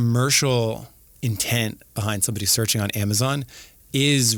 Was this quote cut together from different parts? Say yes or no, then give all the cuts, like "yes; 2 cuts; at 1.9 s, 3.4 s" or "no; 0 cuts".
no; 0 cuts